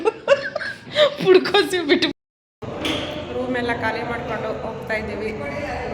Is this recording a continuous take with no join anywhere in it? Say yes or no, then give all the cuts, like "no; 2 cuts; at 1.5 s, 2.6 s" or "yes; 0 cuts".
no; 1 cut; at 2.0 s